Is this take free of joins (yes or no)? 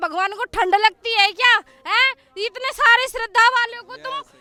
yes